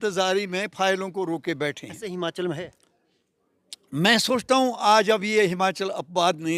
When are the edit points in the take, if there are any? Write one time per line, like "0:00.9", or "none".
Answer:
none